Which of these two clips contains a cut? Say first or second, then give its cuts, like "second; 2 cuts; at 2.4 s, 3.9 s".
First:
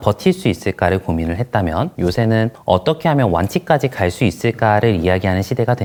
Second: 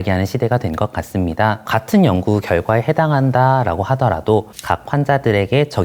second; 1 cut; at 1.6 s